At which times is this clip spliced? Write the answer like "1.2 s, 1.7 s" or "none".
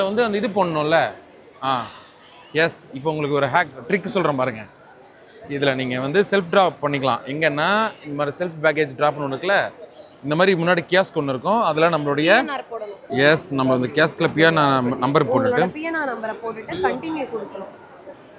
none